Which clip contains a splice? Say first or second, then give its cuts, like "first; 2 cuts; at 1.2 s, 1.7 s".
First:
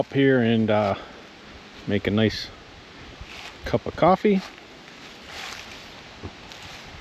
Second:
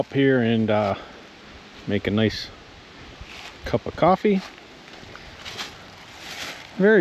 second; 1 cut; at 4.9 s